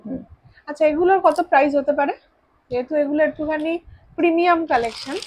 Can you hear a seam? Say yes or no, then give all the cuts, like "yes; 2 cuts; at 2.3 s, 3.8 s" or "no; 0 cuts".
no; 0 cuts